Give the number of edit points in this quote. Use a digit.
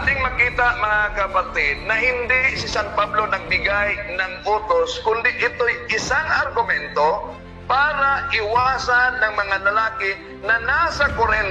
0